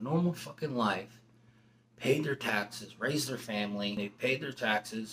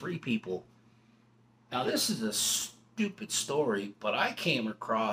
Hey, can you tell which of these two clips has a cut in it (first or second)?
first